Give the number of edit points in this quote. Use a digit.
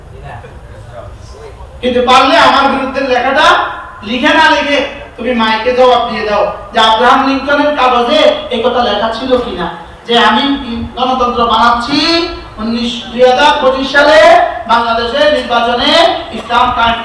0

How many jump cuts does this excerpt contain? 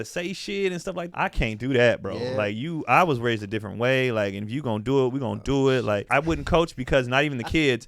2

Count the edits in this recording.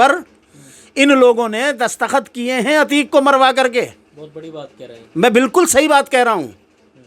0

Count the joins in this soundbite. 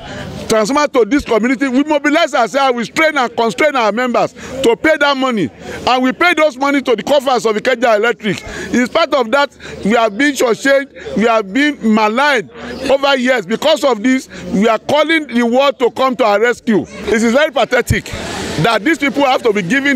1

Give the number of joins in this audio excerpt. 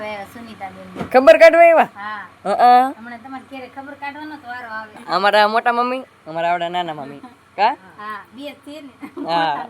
1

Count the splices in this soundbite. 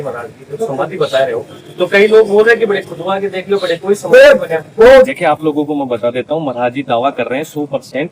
1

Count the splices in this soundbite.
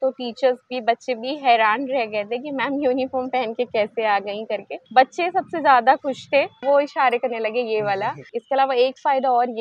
3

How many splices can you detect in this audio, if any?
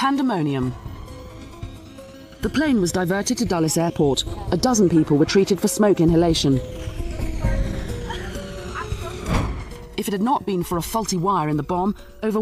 0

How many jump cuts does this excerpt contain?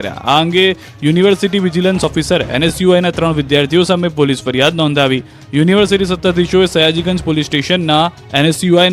1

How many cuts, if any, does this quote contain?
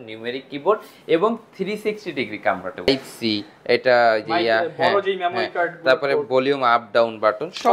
1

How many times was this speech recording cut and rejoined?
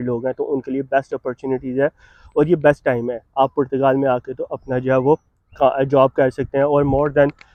0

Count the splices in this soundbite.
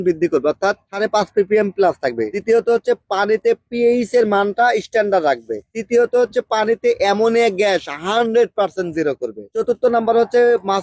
0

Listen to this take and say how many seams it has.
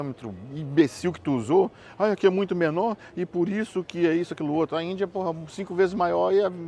0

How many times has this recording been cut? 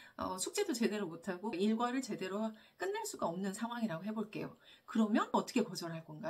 0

